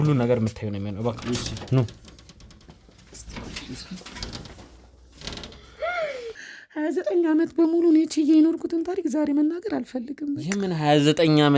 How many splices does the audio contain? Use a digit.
1